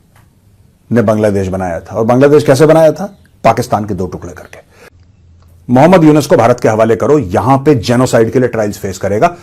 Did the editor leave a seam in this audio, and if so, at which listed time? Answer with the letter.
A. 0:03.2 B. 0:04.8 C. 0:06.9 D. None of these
B